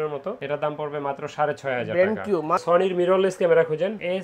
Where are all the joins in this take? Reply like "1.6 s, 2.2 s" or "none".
2.6 s